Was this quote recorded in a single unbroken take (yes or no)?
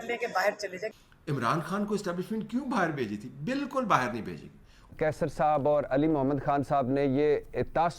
no